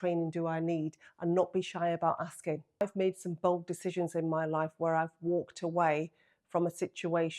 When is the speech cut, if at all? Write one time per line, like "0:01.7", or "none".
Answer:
0:02.8